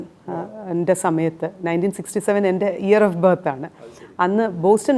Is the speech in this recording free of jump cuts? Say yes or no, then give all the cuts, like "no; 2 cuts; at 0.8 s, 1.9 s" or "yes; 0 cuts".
yes; 0 cuts